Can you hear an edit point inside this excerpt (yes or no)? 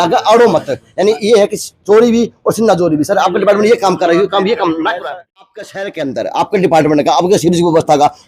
yes